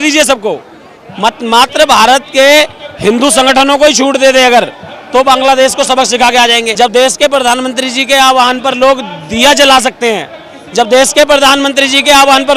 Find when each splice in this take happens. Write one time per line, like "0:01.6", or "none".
0:06.7